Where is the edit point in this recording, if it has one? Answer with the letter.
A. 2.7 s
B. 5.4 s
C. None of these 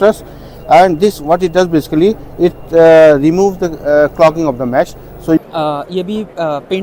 B